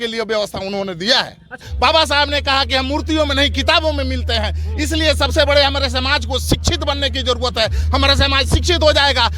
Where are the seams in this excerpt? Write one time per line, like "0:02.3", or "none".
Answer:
0:01.7